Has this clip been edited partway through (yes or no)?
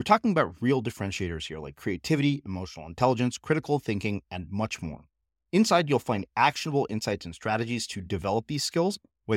no